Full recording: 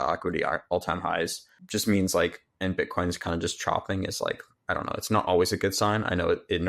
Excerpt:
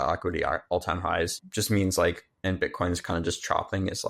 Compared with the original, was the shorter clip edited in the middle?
yes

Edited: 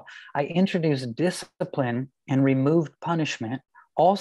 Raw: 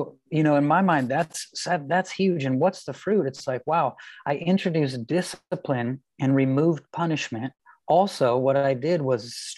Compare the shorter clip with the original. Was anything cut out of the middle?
no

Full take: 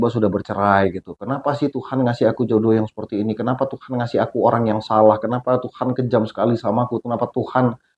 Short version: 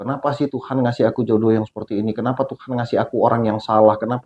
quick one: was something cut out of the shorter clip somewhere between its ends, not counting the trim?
no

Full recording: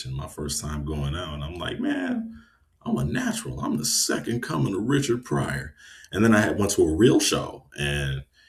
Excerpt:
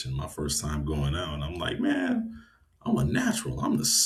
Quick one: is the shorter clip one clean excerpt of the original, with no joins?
yes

